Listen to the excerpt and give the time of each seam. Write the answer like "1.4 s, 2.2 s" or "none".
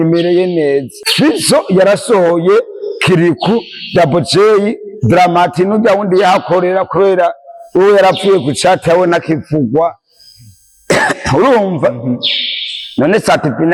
1.0 s